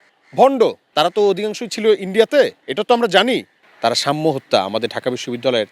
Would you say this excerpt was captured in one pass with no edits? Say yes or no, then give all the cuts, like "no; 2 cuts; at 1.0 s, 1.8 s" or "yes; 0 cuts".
no; 2 cuts; at 0.8 s, 3.6 s